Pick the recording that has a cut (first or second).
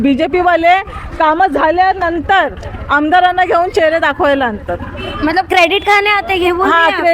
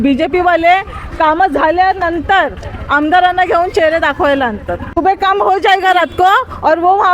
second